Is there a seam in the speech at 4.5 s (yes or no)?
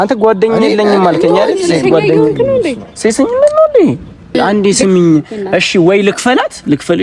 yes